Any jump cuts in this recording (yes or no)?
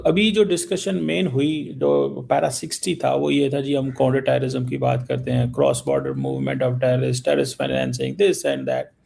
no